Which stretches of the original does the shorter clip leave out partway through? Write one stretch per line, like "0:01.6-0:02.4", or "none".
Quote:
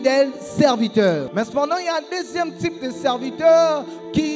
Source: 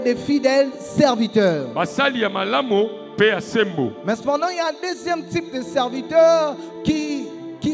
0:01.7-0:04.0